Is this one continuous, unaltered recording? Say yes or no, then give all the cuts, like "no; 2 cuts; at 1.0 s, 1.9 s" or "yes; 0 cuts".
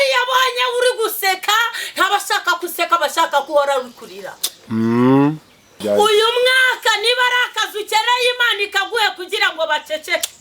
no; 1 cut; at 5.8 s